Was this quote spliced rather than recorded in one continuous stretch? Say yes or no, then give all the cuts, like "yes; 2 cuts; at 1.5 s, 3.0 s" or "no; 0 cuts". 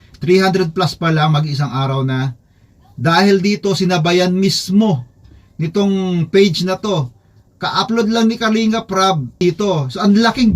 yes; 1 cut; at 9.4 s